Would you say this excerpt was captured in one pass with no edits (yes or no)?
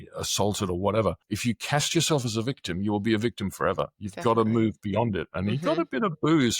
no